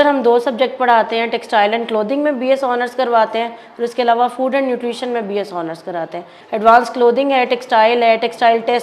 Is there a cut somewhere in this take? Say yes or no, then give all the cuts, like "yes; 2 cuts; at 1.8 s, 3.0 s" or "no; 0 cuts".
yes; 1 cut; at 6.3 s